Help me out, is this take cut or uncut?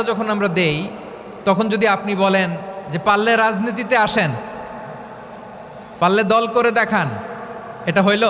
uncut